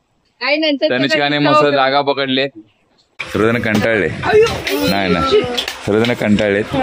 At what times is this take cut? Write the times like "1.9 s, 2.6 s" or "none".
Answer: 3.1 s